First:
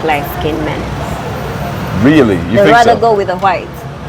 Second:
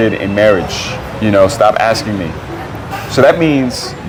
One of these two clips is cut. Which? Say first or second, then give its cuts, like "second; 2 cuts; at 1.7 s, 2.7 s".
first; 1 cut; at 1.3 s